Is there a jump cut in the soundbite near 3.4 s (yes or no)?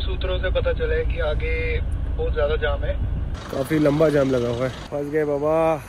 yes